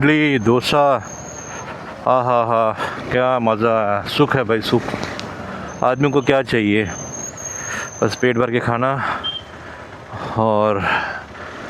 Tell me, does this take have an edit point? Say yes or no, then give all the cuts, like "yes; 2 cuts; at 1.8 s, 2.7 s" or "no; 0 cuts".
no; 0 cuts